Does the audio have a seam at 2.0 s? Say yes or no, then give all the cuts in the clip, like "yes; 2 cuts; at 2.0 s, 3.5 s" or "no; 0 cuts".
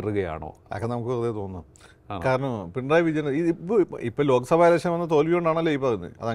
no; 0 cuts